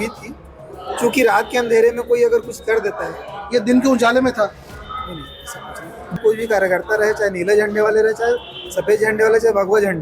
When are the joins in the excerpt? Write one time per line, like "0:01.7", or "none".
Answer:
0:06.2